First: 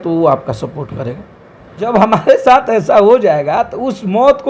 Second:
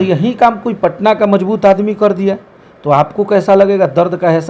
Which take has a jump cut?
first; 1 cut; at 1.9 s

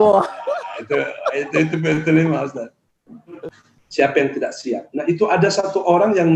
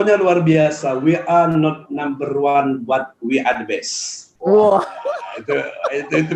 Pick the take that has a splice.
first; 1 cut; at 3.4 s

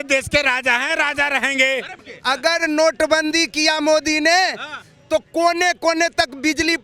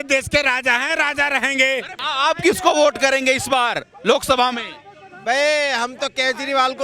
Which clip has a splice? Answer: first; 1 cut; at 2.0 s

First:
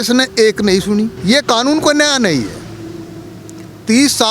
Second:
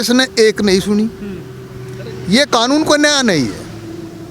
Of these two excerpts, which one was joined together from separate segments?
first; 1 cut; at 1.2 s

